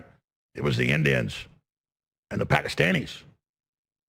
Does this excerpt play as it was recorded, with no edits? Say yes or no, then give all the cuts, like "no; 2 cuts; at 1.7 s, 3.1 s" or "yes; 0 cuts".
yes; 0 cuts